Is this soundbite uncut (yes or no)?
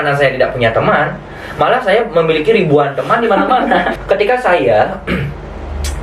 no